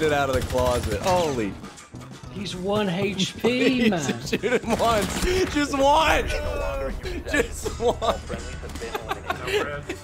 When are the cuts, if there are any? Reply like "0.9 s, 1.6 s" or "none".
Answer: none